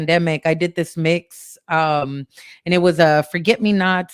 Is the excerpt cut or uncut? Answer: uncut